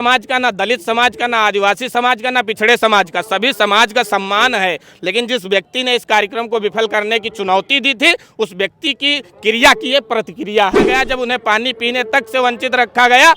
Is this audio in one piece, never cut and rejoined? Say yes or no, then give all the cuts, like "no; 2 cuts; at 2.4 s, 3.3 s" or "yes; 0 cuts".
no; 1 cut; at 10.9 s